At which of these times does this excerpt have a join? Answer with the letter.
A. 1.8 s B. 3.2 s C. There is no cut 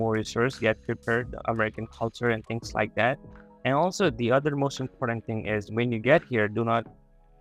C